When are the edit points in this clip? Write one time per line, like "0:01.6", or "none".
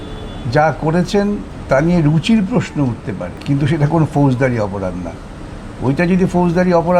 0:01.5
0:03.3